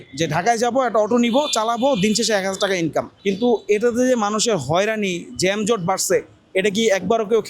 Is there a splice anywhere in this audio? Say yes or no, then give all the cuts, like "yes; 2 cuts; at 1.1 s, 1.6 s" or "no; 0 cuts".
no; 0 cuts